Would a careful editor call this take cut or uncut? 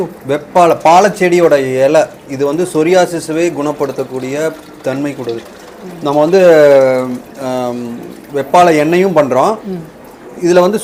uncut